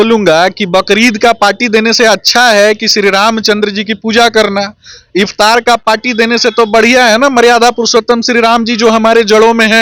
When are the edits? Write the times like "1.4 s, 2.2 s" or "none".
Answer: none